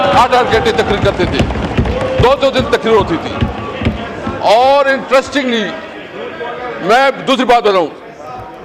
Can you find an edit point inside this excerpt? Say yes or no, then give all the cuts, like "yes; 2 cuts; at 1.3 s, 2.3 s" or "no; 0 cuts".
no; 0 cuts